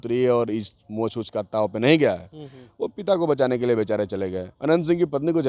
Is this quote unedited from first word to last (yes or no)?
no